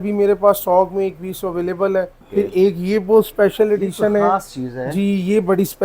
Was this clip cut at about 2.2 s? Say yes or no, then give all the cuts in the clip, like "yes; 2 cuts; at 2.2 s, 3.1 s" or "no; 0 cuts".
yes; 1 cut; at 2.2 s